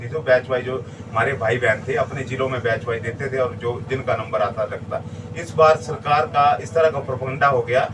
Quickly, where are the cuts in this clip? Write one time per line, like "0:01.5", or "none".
none